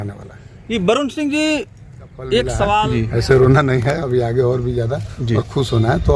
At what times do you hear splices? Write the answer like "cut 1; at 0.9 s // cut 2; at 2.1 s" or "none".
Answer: cut 1; at 2.9 s